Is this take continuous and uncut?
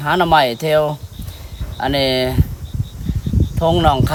yes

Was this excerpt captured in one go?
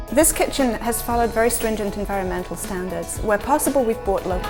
yes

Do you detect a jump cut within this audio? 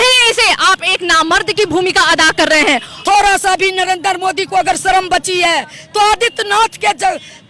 yes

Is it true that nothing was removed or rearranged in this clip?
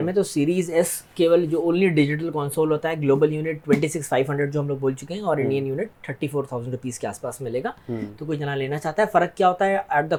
yes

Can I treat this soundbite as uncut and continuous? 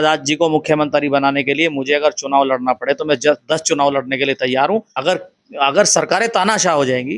no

